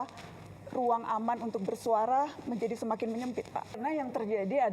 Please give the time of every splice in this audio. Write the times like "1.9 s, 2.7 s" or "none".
3.8 s